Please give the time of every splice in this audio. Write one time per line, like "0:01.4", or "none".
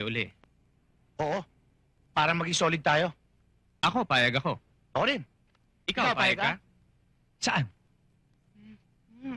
none